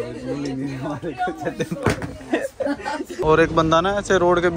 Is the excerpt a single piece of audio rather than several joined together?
no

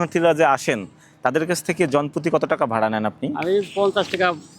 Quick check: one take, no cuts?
yes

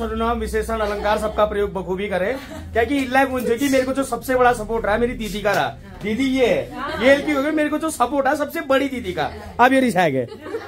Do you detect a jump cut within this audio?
no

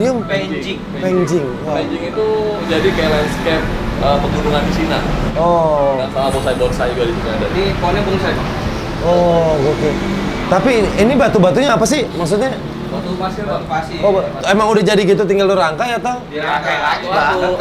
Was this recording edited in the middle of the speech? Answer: no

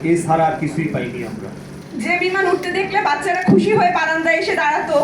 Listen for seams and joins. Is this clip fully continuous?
no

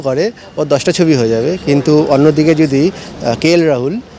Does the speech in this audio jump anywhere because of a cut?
no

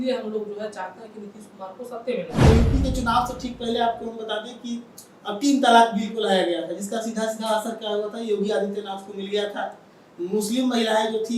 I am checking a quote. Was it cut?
yes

